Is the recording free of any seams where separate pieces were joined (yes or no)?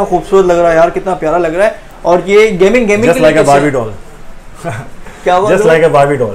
yes